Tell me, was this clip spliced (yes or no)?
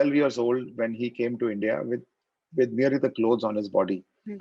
no